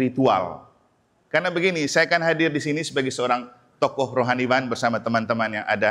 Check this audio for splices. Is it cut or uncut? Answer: uncut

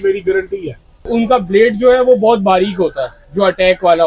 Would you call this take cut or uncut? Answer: cut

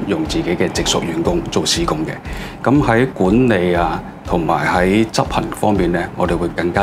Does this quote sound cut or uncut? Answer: uncut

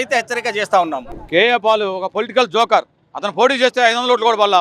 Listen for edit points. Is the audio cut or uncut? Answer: cut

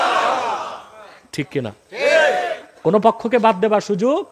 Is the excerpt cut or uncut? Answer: uncut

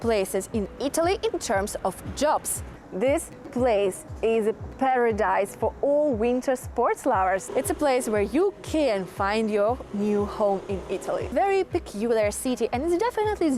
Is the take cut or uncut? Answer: cut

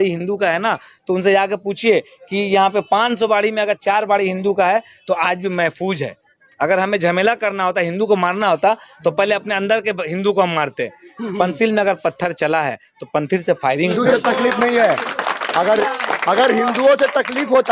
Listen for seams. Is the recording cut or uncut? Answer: cut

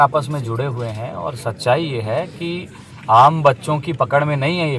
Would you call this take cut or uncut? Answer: uncut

